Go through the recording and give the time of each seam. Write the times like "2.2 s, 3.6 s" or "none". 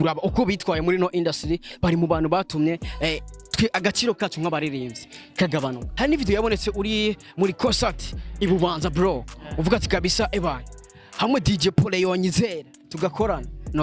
5.8 s